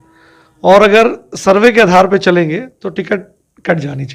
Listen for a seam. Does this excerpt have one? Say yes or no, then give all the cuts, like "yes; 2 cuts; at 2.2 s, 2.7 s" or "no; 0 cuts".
no; 0 cuts